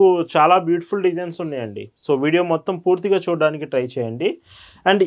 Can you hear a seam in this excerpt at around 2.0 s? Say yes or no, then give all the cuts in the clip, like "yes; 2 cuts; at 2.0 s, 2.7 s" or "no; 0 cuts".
no; 0 cuts